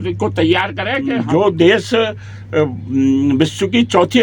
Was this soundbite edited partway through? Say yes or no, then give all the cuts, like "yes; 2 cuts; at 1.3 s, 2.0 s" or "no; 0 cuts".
yes; 1 cut; at 1.1 s